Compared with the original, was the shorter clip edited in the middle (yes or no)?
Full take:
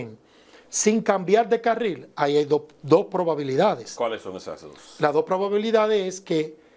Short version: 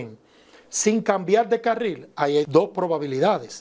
yes